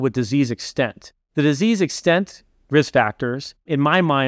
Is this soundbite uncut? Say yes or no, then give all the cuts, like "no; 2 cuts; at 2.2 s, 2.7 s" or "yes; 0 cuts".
yes; 0 cuts